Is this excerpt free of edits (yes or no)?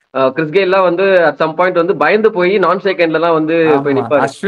yes